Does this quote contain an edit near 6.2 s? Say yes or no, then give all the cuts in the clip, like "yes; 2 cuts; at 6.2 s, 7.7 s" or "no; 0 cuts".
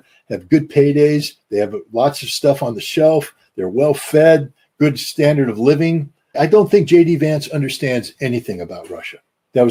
no; 0 cuts